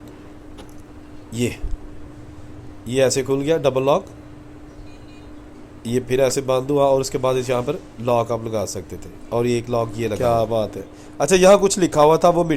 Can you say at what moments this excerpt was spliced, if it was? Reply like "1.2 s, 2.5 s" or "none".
10.2 s